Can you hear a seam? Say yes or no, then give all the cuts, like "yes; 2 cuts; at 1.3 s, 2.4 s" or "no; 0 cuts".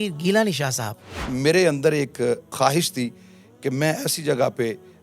yes; 2 cuts; at 1.2 s, 2.5 s